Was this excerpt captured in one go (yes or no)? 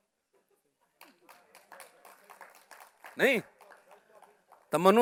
yes